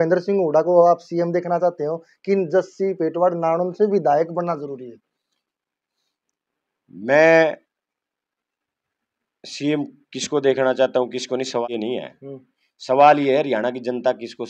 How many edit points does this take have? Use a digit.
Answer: 0